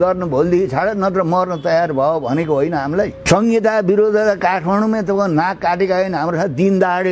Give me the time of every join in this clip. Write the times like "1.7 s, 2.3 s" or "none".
3.2 s